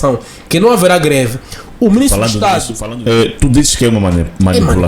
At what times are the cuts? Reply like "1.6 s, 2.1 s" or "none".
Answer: 2.8 s